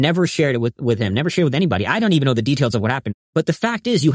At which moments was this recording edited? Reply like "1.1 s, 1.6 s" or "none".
3.1 s